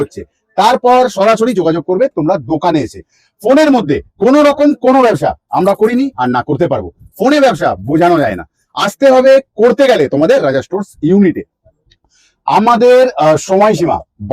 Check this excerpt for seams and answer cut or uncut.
uncut